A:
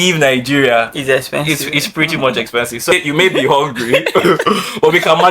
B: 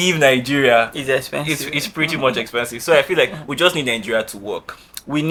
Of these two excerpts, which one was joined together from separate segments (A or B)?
A